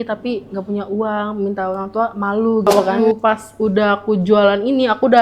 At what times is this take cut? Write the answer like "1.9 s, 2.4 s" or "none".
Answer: 2.8 s